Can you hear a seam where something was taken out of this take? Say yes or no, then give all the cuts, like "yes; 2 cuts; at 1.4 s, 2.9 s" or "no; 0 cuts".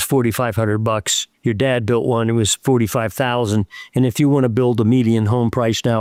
no; 0 cuts